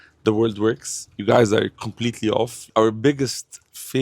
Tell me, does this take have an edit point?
yes; 1 cut; at 2.7 s

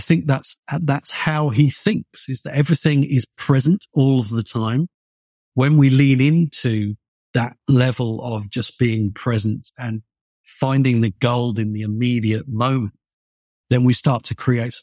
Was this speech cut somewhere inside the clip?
yes; 1 cut; at 5.4 s

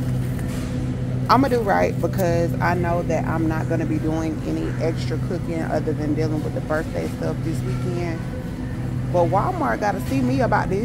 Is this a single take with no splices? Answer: yes; 0 cuts

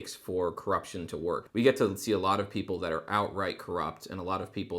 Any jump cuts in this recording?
yes; 1 cut; at 1.5 s

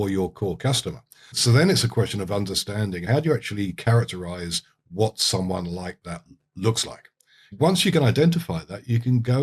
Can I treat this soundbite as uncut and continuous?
no; 3 cuts; at 1.3 s, 3.0 s, 7.5 s

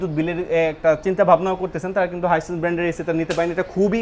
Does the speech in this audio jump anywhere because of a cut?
no; 0 cuts

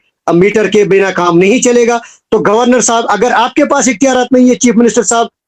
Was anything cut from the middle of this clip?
no; 0 cuts

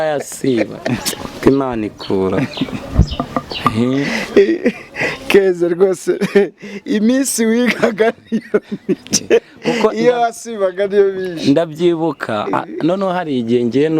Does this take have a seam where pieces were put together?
no; 0 cuts

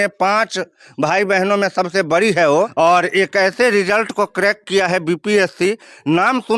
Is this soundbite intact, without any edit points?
no; 1 cut; at 2.7 s

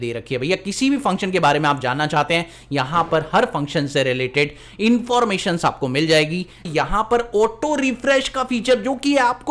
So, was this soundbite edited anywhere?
yes; 1 cut; at 6.7 s

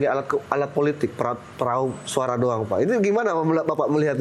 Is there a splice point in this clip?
no; 0 cuts

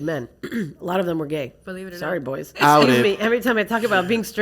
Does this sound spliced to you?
yes; 1 cut; at 2.5 s

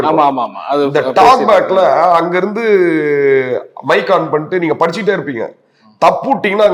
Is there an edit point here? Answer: no; 0 cuts

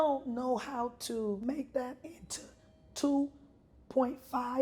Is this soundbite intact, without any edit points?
no; 1 cut; at 1.4 s

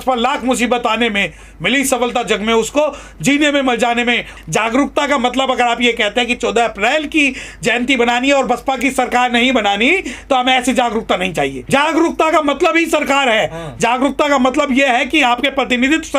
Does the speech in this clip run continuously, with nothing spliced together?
no; 2 cuts; at 4.3 s, 11.6 s

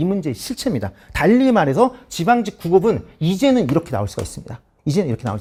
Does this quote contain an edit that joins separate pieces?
no; 0 cuts

